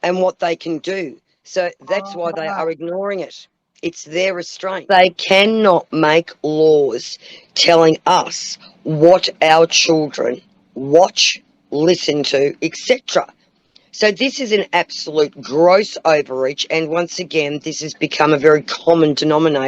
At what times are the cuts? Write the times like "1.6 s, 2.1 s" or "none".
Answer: 4.8 s